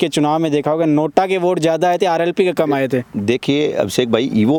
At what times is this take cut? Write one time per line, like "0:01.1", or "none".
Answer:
none

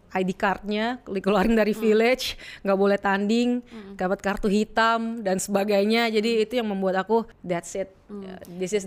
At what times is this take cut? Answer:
0:07.3

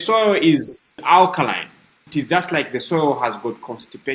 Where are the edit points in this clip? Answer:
0:01.0
0:02.0

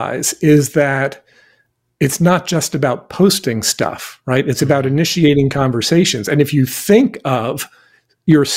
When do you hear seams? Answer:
none

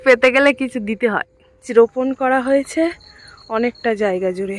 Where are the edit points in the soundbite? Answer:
0:01.6

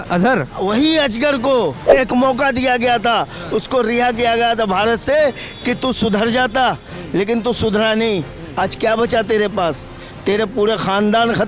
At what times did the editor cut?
0:01.9

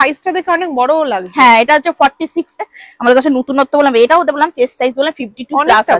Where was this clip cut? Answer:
0:02.6

